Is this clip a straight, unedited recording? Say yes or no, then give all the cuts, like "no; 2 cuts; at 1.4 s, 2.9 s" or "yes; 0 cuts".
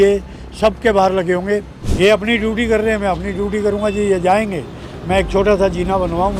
no; 1 cut; at 1.8 s